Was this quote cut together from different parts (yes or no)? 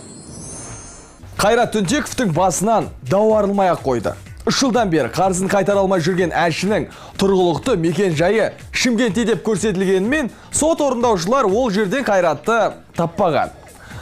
yes